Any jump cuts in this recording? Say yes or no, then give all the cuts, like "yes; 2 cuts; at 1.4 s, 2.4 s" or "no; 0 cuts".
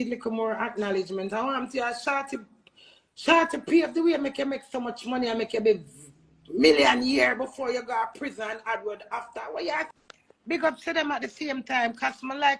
yes; 1 cut; at 9.9 s